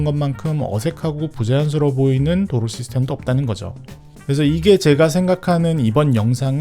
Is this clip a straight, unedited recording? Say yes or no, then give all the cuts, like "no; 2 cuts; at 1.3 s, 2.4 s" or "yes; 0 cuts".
yes; 0 cuts